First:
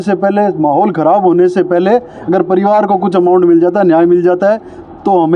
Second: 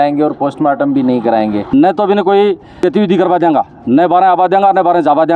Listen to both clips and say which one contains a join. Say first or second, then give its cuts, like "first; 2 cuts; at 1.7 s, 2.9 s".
second; 1 cut; at 1.7 s